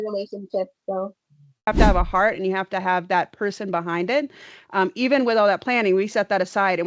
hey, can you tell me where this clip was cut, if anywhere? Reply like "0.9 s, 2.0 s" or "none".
1.7 s